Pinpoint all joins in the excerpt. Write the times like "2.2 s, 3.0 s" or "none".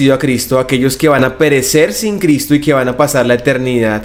none